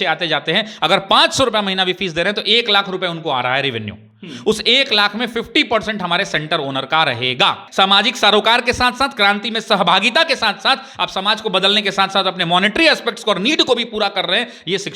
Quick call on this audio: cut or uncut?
cut